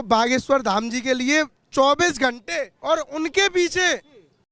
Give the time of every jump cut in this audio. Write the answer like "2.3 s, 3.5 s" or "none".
2.7 s